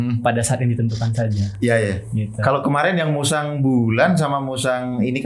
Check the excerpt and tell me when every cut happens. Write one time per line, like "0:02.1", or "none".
none